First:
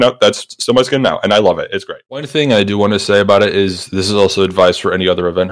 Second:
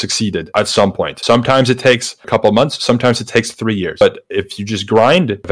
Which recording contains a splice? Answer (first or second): first